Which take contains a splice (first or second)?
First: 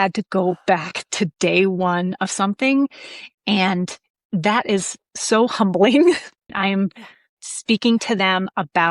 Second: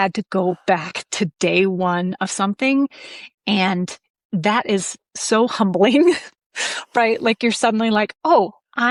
first